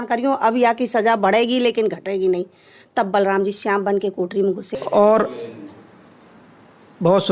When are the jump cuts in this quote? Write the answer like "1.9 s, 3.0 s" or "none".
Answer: 4.7 s